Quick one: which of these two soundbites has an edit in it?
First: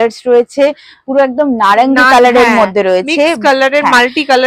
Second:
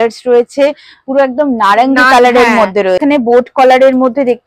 second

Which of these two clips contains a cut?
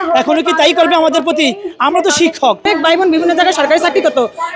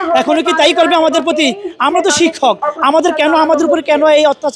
first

